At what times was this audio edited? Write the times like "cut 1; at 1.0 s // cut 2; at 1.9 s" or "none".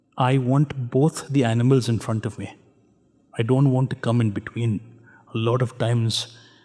none